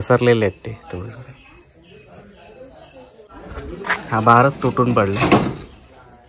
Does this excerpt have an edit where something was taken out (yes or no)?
yes